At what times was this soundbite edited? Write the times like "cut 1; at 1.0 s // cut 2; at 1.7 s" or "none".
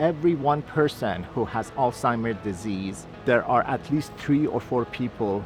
cut 1; at 3.0 s